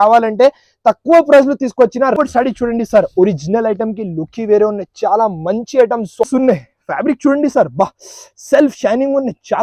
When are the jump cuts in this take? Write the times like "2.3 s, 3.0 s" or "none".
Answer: 2.2 s, 6.2 s